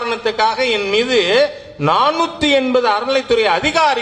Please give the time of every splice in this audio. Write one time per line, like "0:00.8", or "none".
none